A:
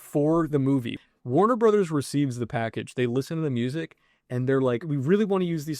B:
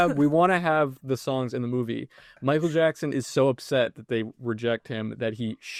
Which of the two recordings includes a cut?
A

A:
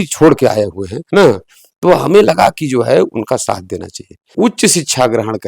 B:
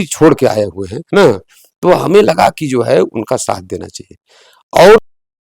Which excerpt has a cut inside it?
A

